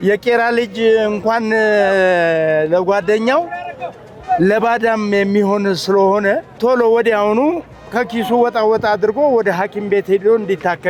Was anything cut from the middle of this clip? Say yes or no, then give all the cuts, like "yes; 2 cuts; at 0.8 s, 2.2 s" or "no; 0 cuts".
yes; 1 cut; at 6.5 s